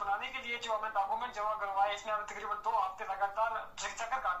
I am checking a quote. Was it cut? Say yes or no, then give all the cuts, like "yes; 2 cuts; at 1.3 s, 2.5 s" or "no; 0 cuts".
no; 0 cuts